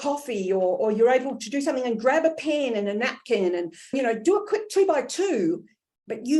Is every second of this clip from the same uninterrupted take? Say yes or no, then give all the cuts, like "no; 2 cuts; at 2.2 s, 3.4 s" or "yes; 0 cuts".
no; 1 cut; at 3.9 s